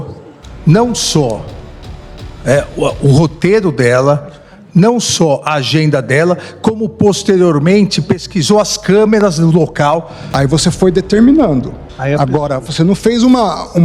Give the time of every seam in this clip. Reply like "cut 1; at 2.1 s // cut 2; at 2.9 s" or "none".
cut 1; at 10.2 s